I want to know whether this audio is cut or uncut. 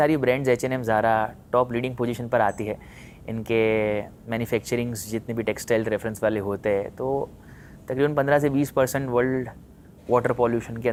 uncut